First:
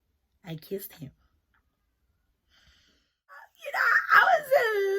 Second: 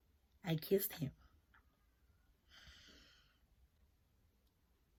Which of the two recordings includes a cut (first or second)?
first